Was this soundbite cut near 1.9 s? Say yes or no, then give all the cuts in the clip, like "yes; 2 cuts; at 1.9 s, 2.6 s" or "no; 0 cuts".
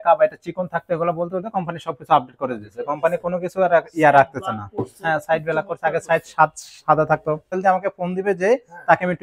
no; 1 cut; at 7.6 s